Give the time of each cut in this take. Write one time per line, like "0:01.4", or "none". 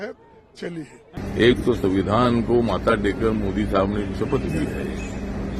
0:01.2